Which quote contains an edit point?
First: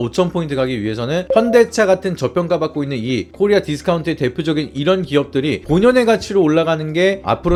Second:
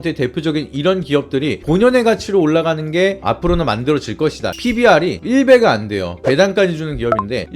second; 1 cut; at 4.5 s

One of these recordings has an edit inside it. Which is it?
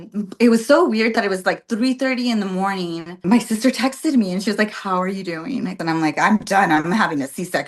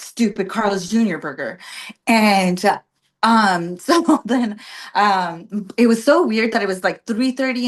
first; 2 cuts; at 3.2 s, 5.8 s

